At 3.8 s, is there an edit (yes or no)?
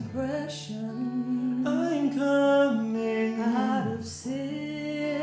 no